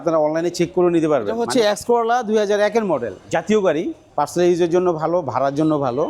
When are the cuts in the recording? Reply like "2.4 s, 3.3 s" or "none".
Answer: 1.4 s, 4.0 s

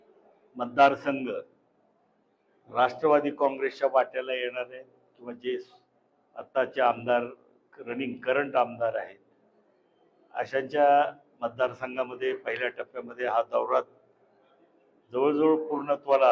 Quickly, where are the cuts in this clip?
none

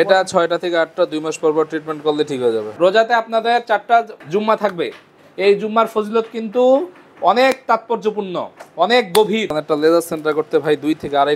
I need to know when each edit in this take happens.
2.7 s, 9.5 s

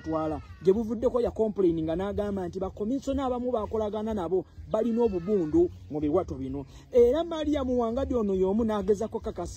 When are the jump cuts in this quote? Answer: none

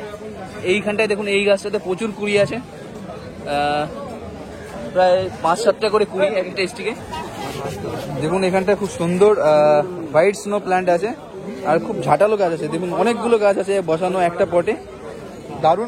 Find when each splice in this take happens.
7.0 s

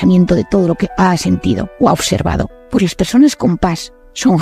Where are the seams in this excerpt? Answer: 2.6 s

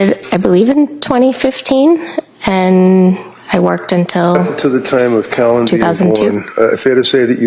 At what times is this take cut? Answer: 4.5 s

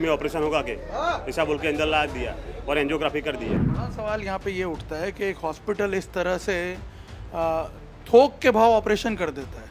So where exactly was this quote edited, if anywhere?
3.7 s

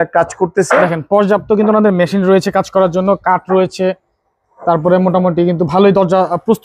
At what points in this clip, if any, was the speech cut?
none

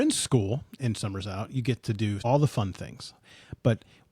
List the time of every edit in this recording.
2.2 s

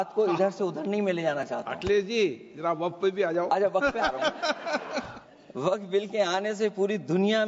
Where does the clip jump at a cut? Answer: 5.2 s

